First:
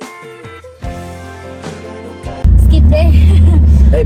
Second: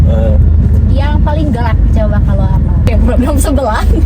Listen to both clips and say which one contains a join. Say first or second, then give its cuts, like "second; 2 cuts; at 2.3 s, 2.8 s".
second; 1 cut; at 2.9 s